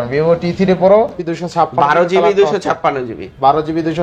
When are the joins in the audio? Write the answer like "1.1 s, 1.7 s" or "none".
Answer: 1.2 s